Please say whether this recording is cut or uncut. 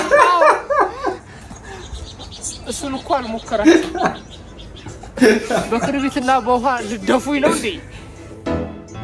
uncut